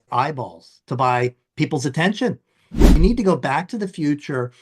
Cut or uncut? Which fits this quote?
cut